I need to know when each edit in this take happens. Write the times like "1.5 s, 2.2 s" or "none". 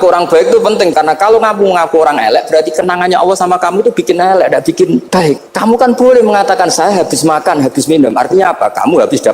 0.9 s, 5.2 s